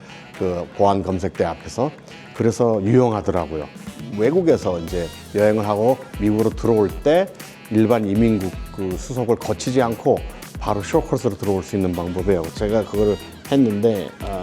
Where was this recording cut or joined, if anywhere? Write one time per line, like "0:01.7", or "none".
0:03.9